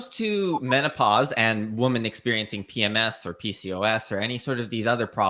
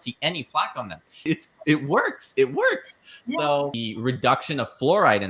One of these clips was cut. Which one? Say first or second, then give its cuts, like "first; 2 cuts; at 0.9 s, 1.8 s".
second; 2 cuts; at 1.2 s, 3.8 s